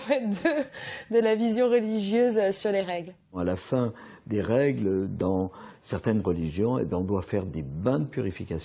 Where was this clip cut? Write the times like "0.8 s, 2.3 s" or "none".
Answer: none